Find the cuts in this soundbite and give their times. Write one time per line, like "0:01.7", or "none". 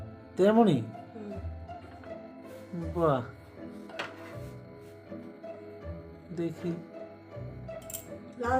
0:04.3
0:06.3